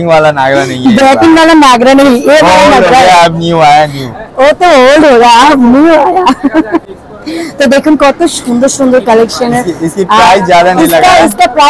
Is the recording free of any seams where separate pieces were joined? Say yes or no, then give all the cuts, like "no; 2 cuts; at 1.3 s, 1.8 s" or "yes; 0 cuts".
yes; 0 cuts